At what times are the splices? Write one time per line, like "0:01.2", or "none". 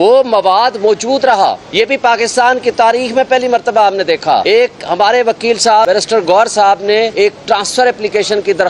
0:01.6
0:04.4
0:05.9
0:07.1